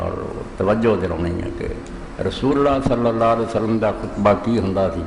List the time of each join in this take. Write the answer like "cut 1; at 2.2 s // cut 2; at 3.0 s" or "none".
cut 1; at 3.1 s